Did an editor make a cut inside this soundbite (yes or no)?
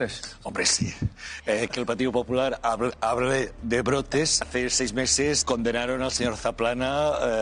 no